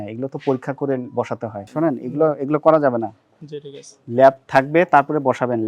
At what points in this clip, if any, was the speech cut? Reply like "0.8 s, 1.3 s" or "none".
1.7 s

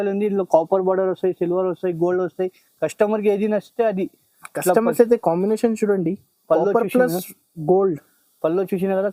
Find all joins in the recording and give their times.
none

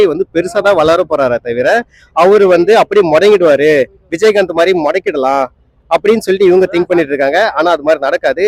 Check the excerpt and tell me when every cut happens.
none

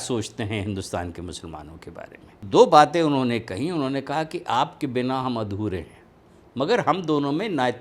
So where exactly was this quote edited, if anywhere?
2.5 s

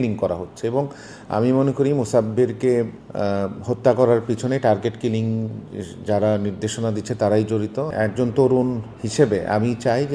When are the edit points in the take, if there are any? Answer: 7.9 s

